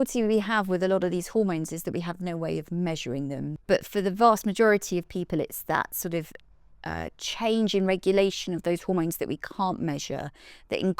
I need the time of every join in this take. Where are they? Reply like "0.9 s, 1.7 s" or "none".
3.5 s